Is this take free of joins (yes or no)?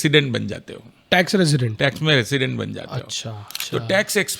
no